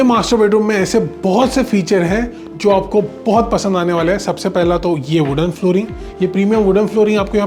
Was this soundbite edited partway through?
no; 0 cuts

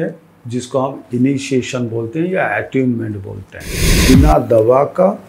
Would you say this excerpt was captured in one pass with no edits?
no; 1 cut; at 4.0 s

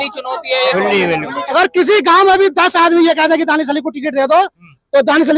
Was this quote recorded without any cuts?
no; 1 cut; at 1.1 s

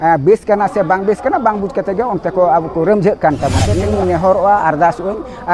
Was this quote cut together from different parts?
yes; 1 cut; at 3.9 s

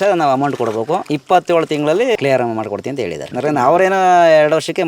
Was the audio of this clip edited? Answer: yes; 3 cuts; at 1.1 s, 2.2 s, 3.3 s

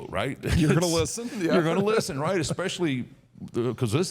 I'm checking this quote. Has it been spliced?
no; 0 cuts

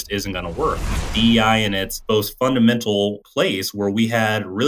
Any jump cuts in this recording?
yes; 3 cuts; at 1.1 s, 1.9 s, 3.2 s

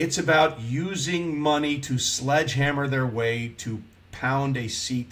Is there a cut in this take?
no; 0 cuts

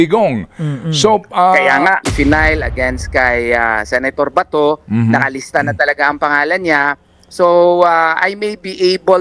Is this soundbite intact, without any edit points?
no; 1 cut; at 2.0 s

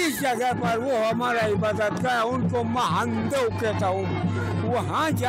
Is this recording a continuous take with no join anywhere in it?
yes; 0 cuts

